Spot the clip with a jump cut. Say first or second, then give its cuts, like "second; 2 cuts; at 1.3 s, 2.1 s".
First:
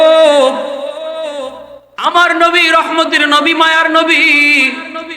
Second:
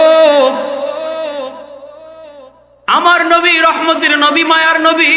first; 1 cut; at 2.0 s